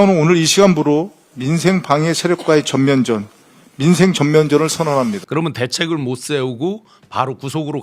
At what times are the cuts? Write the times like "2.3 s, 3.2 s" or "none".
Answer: 5.2 s